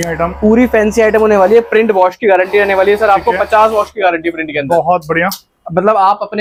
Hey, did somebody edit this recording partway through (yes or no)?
no